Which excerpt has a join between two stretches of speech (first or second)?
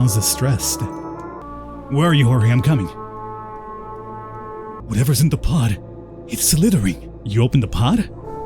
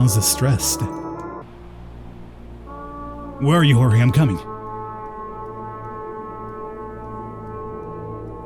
first